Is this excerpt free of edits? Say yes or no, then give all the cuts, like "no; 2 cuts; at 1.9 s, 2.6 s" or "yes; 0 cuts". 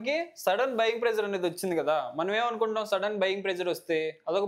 yes; 0 cuts